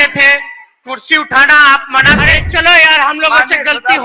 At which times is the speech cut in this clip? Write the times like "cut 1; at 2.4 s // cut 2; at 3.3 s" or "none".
cut 1; at 2.4 s